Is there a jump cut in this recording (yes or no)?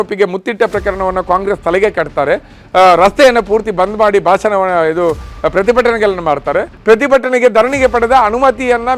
yes